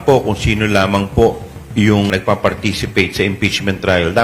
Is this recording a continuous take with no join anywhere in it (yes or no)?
no